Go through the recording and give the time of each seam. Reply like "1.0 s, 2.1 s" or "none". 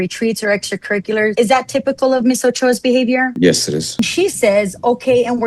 1.3 s, 4.0 s